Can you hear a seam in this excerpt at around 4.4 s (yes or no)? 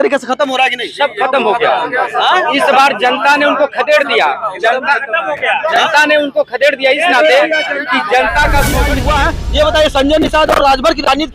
no